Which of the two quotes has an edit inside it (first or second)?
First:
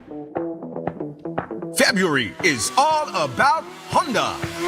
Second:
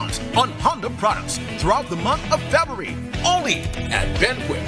first